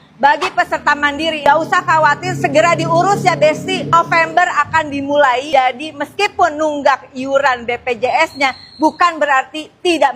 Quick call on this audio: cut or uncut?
cut